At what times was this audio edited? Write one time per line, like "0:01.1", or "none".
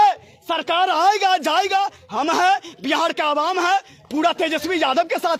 none